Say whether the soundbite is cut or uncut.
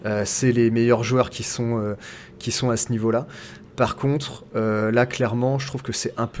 uncut